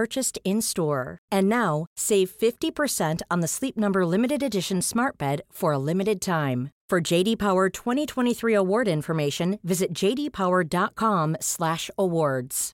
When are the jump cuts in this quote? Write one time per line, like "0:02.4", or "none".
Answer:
none